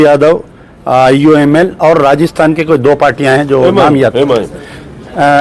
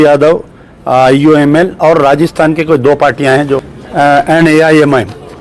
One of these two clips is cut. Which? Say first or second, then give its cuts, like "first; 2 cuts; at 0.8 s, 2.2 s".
second; 1 cut; at 3.6 s